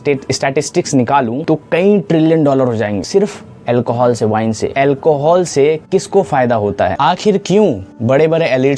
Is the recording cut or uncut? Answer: cut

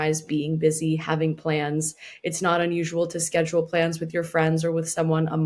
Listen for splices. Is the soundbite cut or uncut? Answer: uncut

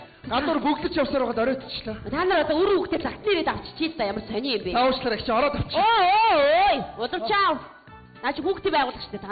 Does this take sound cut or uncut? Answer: cut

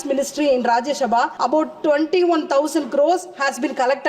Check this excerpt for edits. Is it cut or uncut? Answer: cut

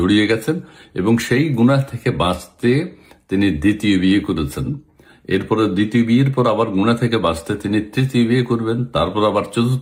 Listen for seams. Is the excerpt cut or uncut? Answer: uncut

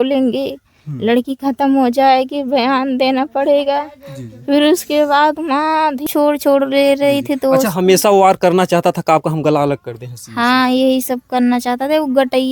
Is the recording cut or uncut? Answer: cut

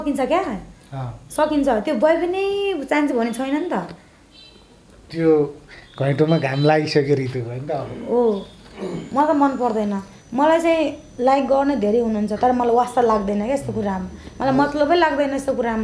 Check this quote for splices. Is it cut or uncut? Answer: uncut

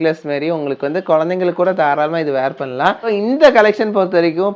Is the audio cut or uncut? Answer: cut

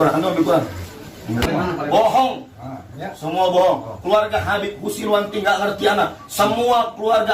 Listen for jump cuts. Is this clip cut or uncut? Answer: cut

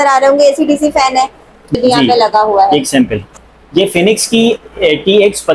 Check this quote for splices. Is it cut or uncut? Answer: cut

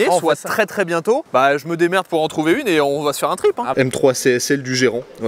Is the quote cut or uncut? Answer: cut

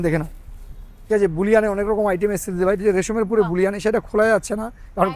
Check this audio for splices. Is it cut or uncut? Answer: uncut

